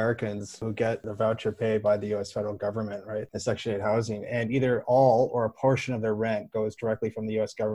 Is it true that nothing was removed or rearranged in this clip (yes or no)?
no